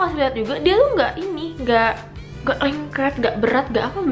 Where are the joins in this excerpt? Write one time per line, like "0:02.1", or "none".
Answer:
none